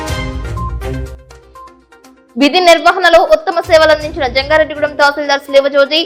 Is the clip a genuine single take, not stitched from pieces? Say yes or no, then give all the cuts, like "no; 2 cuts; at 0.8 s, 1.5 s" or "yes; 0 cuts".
yes; 0 cuts